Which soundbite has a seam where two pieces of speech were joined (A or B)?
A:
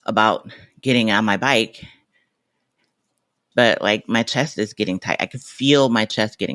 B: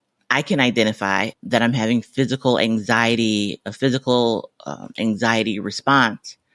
A